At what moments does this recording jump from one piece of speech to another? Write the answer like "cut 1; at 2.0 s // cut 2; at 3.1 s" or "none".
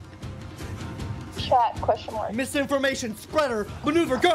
none